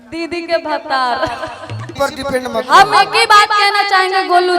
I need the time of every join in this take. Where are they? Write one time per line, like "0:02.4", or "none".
0:01.8